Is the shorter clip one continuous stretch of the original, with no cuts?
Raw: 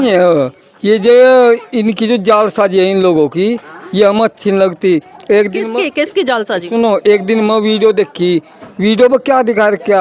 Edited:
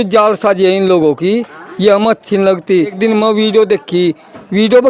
no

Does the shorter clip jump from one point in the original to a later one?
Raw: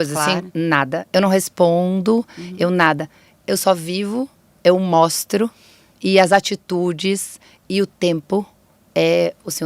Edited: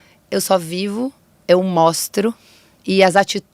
no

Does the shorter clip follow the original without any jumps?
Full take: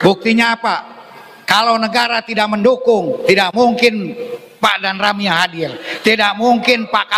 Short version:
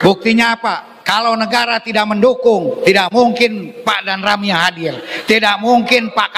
no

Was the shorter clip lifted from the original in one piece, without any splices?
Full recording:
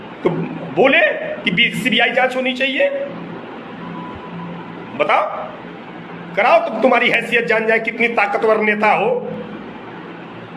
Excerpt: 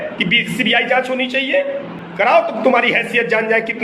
no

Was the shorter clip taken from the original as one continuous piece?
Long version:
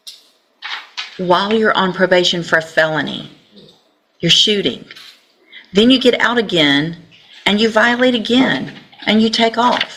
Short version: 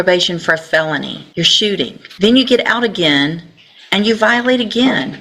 no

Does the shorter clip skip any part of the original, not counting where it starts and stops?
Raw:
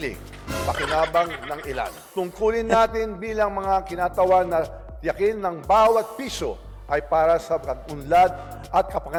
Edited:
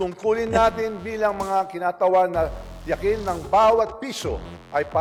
no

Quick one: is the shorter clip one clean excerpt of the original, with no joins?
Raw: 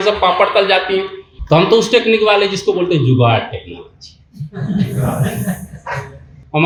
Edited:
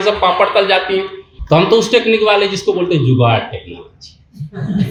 yes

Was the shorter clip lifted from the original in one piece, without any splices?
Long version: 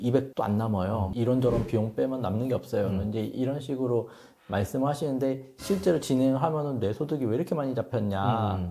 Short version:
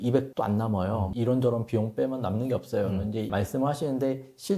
no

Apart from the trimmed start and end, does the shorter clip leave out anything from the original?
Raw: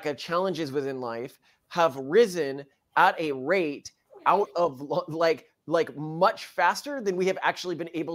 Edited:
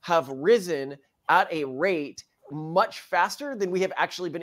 yes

